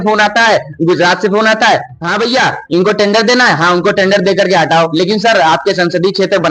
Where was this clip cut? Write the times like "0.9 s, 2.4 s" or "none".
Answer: none